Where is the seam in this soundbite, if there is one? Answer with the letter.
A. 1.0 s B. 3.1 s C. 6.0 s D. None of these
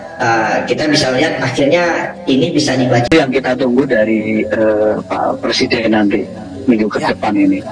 B